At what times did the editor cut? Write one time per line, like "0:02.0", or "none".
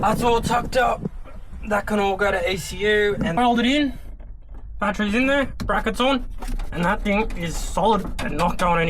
0:03.4